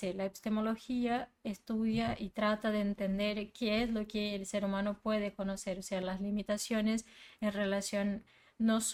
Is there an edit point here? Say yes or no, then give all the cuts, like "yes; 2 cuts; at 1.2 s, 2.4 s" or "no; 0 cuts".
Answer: no; 0 cuts